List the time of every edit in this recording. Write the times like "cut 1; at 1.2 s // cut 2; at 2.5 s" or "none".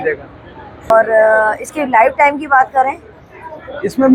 none